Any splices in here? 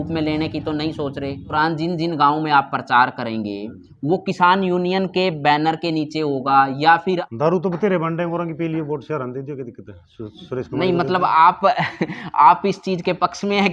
yes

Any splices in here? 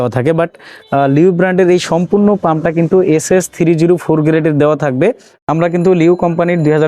yes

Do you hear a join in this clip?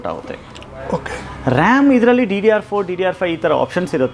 no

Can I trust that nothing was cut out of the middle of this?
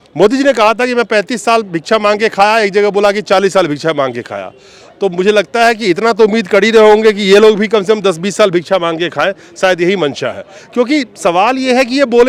yes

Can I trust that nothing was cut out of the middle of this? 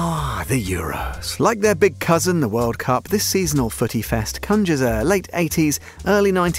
yes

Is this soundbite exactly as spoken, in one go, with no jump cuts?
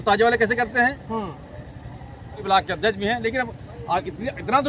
no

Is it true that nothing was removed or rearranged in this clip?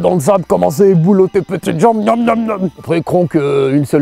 yes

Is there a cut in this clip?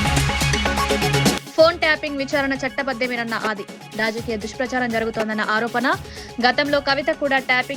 no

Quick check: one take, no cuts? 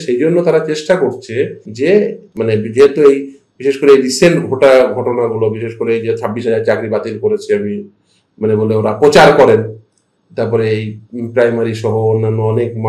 no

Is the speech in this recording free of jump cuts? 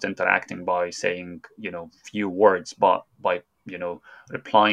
no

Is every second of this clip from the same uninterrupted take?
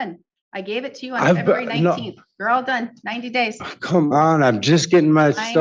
yes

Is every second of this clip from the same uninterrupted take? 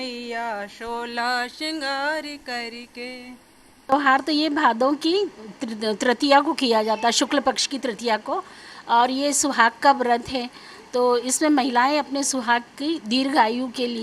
no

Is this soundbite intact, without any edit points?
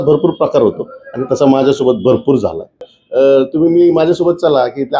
no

